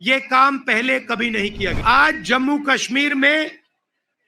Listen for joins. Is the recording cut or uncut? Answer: cut